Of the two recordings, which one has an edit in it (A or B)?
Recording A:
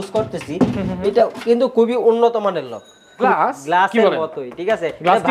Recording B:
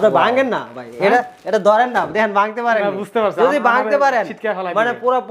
A